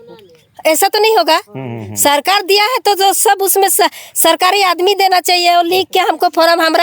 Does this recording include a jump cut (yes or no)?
no